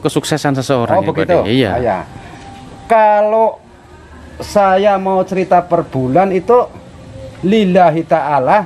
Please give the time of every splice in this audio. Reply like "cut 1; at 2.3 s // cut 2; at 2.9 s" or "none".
none